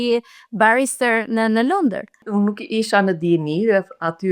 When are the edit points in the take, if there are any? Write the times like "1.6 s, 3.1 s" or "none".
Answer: 2.2 s